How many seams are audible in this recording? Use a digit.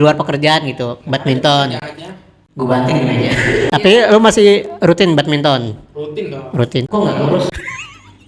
1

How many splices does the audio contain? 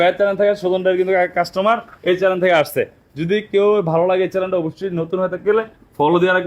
0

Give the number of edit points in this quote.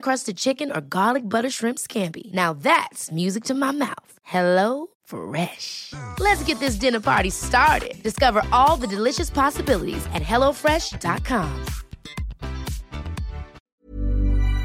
1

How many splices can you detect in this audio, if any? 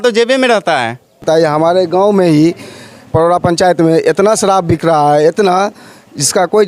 1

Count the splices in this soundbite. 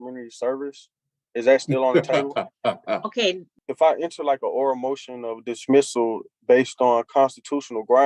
1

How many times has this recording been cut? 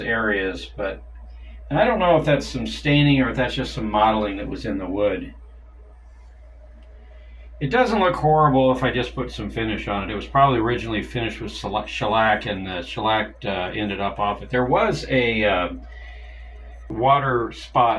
1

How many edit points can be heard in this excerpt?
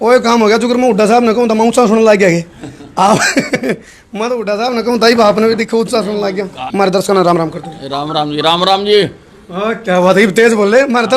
1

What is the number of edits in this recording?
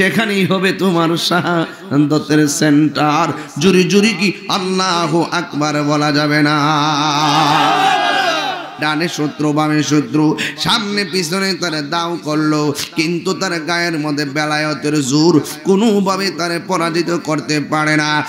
1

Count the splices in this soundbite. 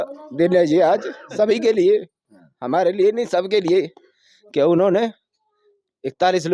0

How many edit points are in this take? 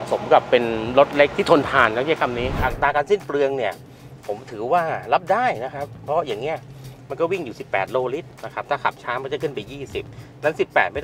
2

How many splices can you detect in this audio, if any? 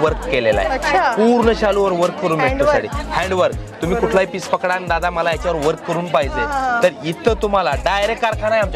0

